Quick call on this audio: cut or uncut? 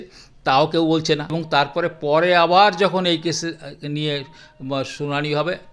cut